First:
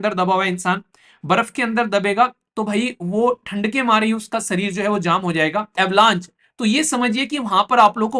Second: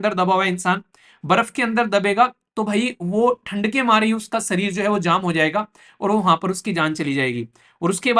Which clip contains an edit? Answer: first; 1 cut; at 5.8 s

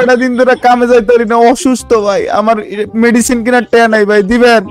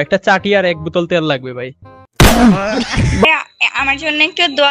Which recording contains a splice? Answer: second; 1 cut; at 3.2 s

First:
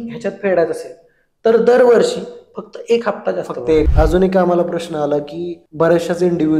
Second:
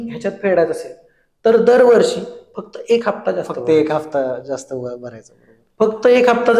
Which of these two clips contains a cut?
first; 1 cut; at 3.9 s

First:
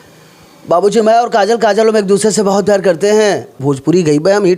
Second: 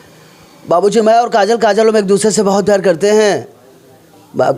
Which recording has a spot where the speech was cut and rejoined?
first; 1 cut; at 3.6 s

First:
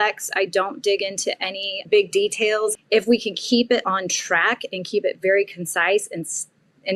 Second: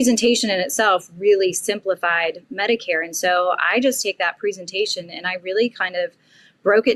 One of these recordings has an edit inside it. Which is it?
first; 2 cuts; at 1.8 s, 2.8 s

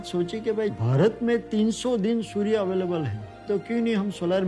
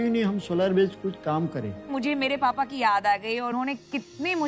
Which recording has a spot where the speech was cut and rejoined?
second; 2 cuts; at 1.9 s, 3.5 s

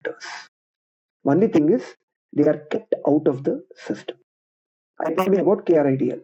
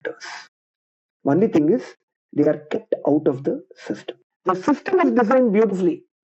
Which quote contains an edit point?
second; 1 cut; at 4.2 s

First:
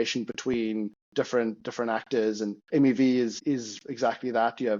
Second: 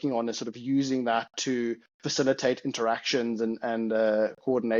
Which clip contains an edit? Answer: first; 3 cuts; at 1.0 s, 2.6 s, 3.4 s

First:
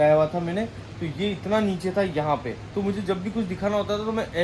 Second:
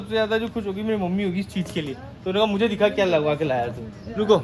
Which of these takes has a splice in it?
first; 1 cut; at 2.6 s

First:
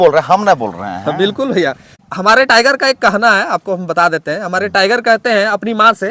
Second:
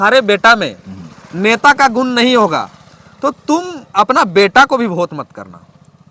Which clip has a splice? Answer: first; 1 cut; at 1.9 s

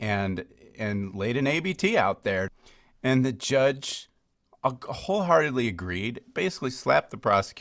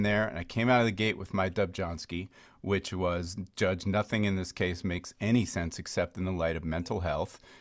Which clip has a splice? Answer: first; 1 cut; at 2.6 s

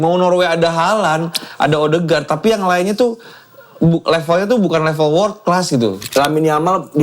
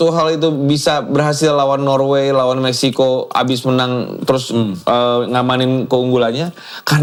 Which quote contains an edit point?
first; 1 cut; at 6.0 s

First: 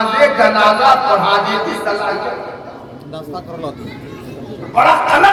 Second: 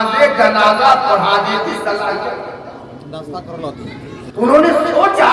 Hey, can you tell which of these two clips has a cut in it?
second; 1 cut; at 4.2 s

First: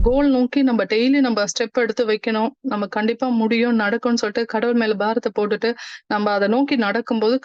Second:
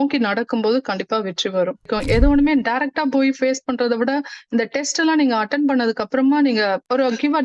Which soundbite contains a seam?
second; 1 cut; at 1.8 s

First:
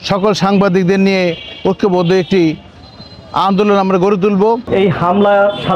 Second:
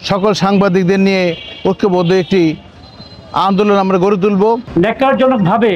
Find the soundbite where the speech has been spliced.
first; 1 cut; at 4.7 s

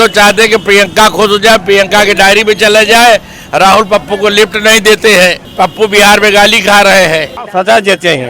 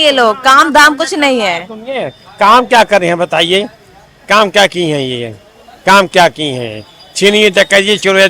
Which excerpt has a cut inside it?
first; 2 cuts; at 5.4 s, 7.5 s

